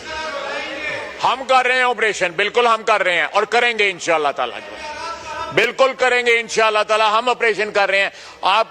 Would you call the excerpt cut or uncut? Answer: cut